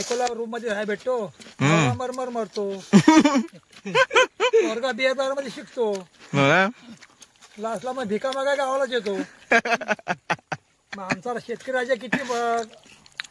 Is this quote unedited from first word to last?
yes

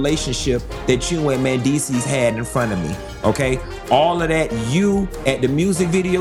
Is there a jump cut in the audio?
no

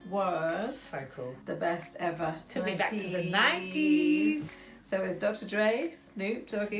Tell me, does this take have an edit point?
yes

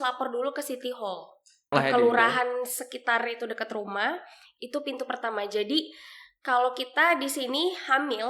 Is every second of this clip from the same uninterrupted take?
no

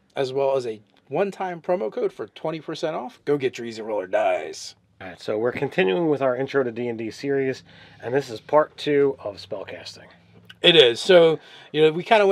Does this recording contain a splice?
no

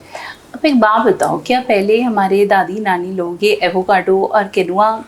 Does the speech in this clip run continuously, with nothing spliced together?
yes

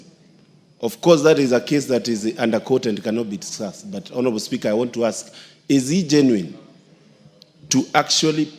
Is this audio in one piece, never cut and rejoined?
yes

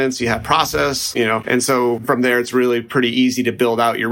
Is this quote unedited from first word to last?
no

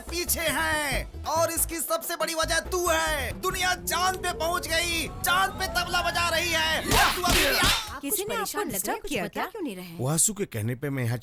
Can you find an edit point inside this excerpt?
yes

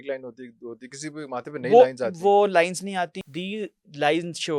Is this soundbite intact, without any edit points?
no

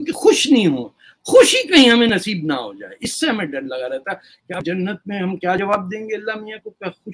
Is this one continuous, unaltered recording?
yes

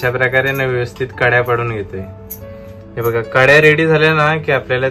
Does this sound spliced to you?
no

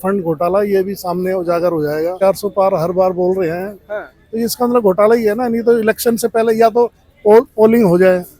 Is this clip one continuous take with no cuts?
no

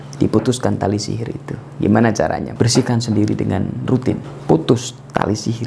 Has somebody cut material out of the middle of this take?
yes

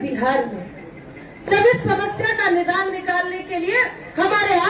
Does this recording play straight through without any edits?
yes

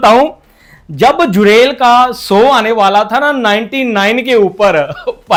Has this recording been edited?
no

